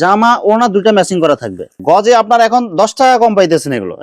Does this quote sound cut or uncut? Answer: cut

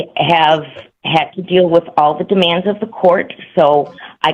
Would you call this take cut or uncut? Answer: uncut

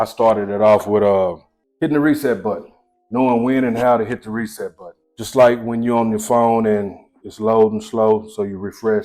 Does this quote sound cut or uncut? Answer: uncut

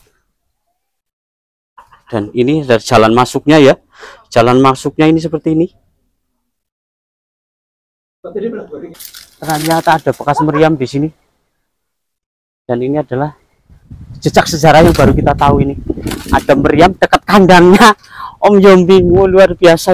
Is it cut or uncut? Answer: cut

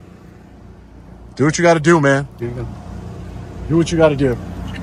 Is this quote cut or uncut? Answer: uncut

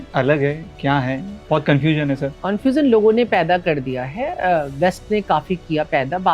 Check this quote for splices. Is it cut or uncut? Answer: cut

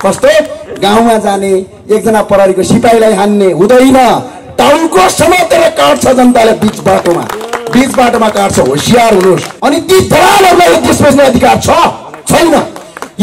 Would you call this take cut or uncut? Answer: cut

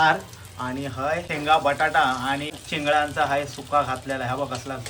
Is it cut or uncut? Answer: cut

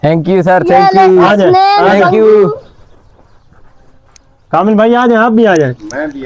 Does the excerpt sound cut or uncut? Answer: uncut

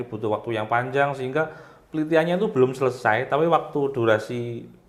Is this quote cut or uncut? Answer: uncut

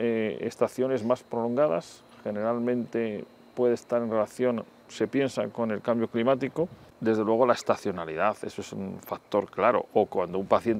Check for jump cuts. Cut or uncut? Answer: cut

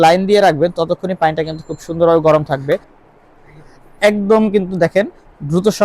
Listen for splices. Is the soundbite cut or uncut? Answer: cut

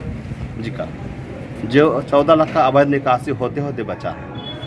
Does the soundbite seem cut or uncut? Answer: uncut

